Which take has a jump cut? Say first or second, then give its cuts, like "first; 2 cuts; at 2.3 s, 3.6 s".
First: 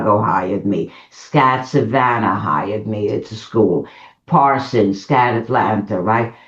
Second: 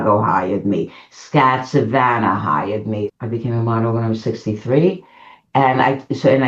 second; 1 cut; at 3.1 s